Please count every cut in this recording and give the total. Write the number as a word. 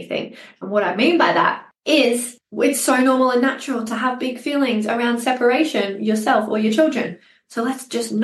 two